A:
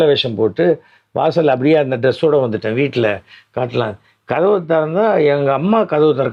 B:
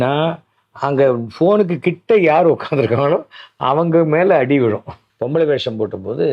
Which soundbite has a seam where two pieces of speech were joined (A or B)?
B